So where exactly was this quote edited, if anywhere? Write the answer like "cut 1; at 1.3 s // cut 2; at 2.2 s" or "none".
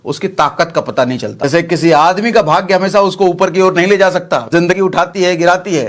cut 1; at 1.4 s // cut 2; at 4.7 s